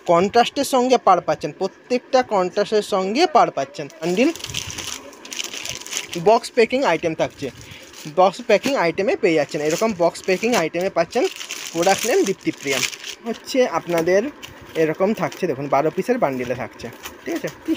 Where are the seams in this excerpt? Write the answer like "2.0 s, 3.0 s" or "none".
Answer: 4.1 s, 13.4 s